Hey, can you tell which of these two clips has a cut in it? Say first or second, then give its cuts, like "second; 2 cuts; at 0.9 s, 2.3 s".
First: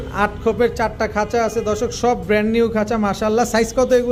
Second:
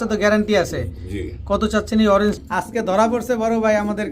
second; 1 cut; at 2.4 s